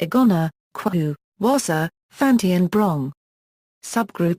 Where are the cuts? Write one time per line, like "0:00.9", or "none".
0:03.1